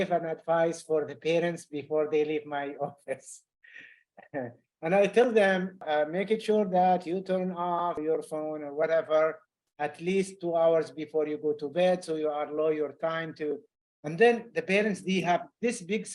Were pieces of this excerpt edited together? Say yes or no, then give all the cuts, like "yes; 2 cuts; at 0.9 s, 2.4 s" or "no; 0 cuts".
yes; 2 cuts; at 5.8 s, 8.0 s